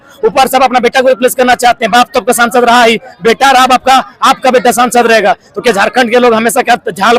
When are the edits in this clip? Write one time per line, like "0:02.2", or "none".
none